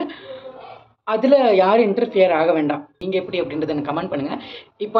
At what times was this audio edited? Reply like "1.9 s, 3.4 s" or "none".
3.0 s